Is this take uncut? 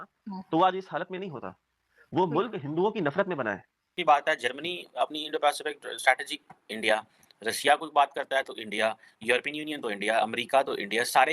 no; 1 cut; at 3.9 s

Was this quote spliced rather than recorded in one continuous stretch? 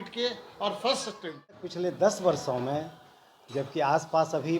yes; 1 cut; at 1.7 s

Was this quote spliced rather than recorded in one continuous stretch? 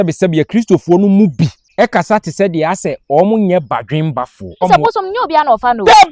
yes; 2 cuts; at 1.6 s, 4.4 s

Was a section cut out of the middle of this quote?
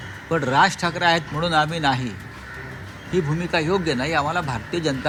no; 0 cuts

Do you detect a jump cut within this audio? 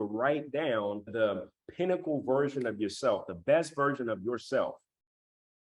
yes; 1 cut; at 1.1 s

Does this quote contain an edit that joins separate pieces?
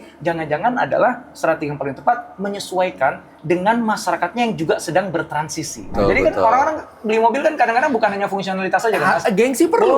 yes; 1 cut; at 5.9 s

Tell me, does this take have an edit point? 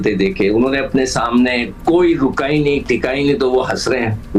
no; 0 cuts

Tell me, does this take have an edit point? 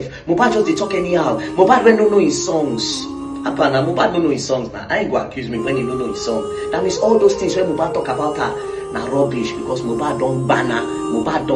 no; 0 cuts

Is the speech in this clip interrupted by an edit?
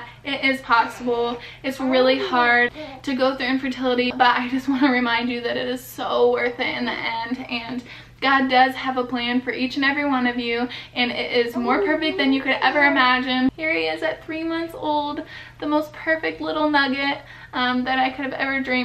yes; 3 cuts; at 2.7 s, 4.1 s, 13.5 s

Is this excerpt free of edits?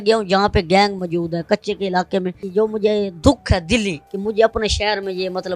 no; 2 cuts; at 2.4 s, 4.1 s

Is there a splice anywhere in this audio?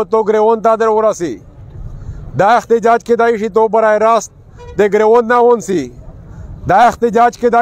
no; 0 cuts

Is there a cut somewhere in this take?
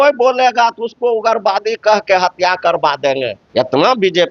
yes; 1 cut; at 3.4 s

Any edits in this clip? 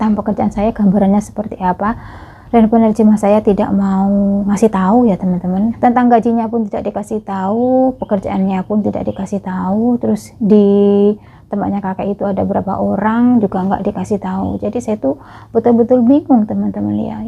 yes; 1 cut; at 5.8 s

